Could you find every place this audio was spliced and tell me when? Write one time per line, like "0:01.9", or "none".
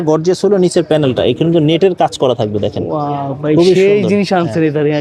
none